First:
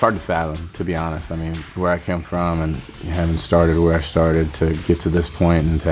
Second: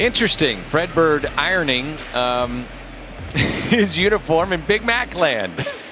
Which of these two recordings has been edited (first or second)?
first